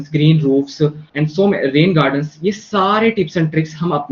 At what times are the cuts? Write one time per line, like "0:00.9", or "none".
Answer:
0:01.0